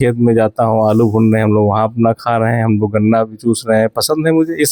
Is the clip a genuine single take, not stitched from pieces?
yes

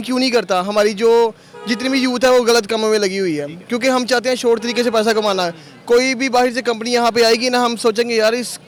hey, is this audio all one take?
yes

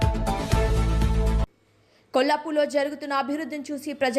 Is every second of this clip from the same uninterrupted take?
no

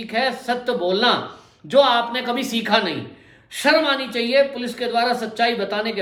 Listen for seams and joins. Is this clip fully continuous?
yes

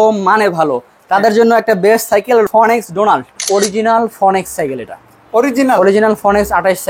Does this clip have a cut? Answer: yes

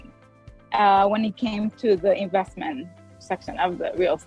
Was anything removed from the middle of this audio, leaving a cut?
no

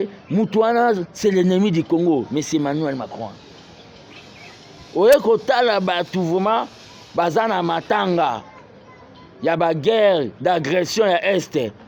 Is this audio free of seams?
yes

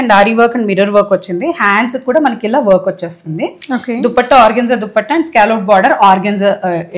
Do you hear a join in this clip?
no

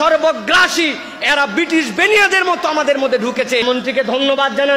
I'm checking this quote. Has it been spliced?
yes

